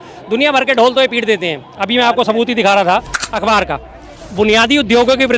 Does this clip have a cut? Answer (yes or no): yes